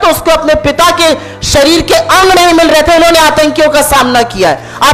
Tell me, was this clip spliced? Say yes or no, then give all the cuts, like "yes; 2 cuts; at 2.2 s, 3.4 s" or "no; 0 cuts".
no; 0 cuts